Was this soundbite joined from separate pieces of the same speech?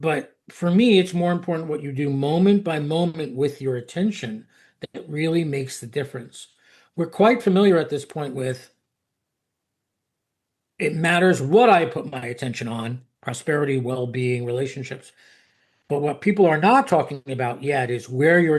no; 0 cuts

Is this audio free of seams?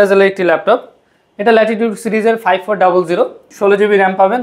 no; 1 cut; at 3.4 s

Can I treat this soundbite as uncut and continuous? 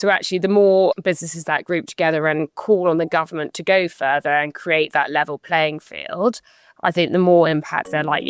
yes; 0 cuts

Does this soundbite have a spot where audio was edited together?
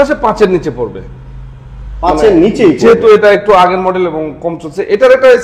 no; 0 cuts

